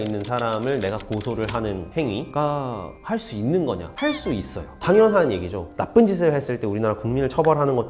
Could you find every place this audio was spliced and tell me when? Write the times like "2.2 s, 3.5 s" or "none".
4.6 s, 5.6 s